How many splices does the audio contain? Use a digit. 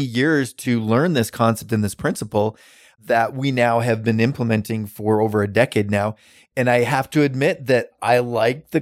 1